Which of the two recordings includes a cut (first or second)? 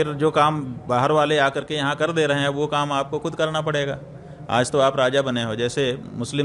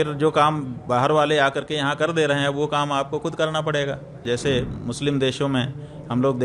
second